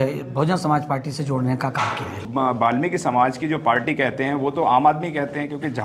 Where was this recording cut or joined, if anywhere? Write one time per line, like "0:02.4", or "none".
0:02.2

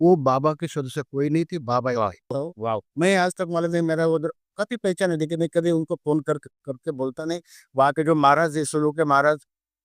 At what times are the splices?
0:02.5

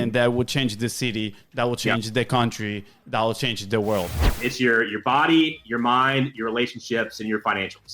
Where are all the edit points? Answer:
0:04.3

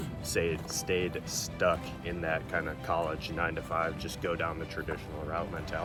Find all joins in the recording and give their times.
none

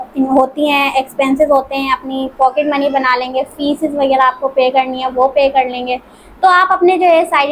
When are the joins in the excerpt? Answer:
none

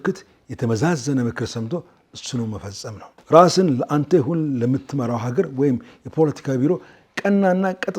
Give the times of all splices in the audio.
0:03.1

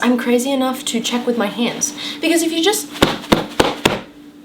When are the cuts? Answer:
none

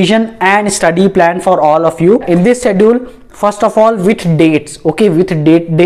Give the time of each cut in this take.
none

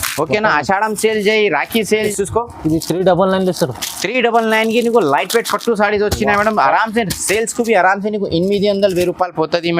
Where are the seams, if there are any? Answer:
0:02.1

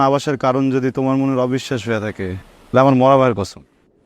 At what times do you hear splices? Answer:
0:02.5

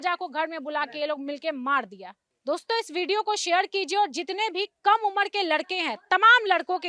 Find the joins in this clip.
none

